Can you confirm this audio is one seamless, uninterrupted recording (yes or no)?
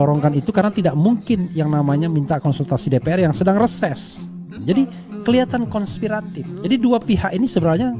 no